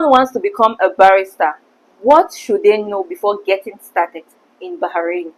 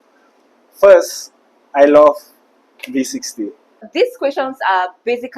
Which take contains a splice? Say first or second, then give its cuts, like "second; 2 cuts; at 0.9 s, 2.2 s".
second; 1 cut; at 3.9 s